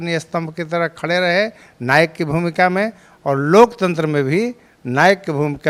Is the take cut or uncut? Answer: uncut